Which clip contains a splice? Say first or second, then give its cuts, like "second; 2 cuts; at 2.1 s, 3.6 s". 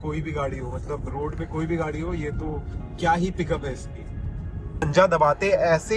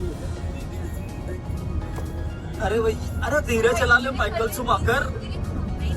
first; 1 cut; at 4.8 s